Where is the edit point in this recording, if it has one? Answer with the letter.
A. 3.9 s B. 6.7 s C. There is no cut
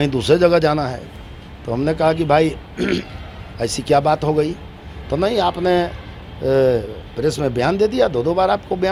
C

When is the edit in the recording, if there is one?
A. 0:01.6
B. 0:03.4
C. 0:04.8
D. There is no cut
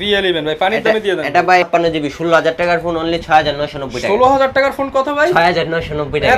A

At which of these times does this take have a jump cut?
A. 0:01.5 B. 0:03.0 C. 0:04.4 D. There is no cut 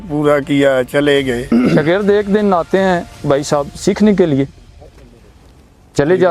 A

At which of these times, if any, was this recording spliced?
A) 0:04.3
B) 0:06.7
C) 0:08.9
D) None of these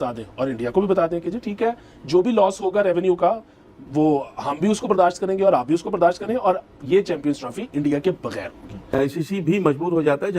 C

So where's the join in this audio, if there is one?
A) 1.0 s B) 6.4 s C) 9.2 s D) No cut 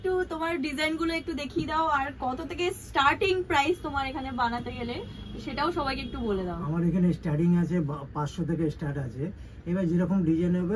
D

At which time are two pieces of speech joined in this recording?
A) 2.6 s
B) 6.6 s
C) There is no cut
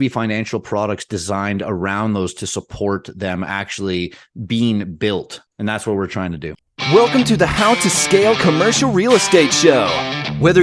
B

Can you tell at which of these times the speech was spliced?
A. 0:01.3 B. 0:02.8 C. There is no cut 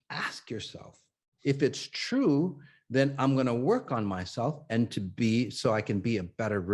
A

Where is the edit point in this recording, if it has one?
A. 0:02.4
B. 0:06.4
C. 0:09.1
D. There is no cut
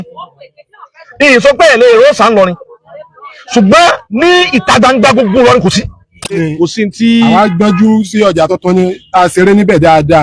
B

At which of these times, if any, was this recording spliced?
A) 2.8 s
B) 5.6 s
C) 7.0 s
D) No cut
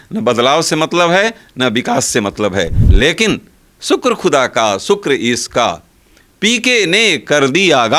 A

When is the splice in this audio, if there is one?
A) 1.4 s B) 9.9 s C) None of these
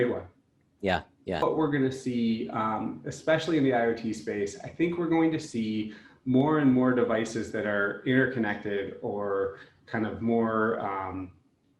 A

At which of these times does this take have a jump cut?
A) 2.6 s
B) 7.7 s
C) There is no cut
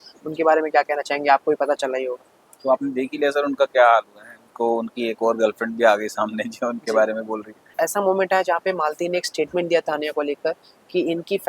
B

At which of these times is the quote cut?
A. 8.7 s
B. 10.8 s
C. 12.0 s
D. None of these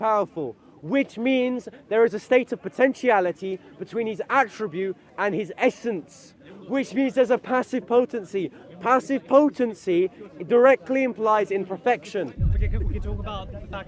D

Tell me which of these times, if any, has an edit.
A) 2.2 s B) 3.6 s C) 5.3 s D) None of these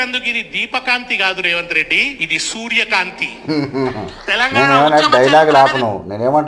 A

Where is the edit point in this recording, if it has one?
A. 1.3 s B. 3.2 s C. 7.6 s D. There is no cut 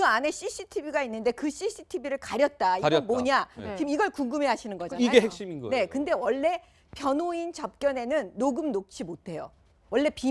C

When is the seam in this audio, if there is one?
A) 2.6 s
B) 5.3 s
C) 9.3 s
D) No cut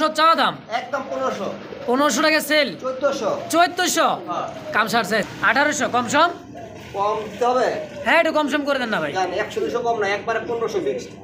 B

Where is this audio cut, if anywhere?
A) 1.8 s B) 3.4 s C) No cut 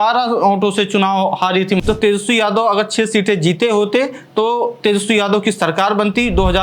A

